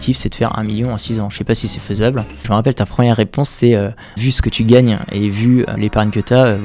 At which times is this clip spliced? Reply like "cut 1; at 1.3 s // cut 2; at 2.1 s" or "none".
cut 1; at 2.3 s // cut 2; at 4.2 s // cut 3; at 5.7 s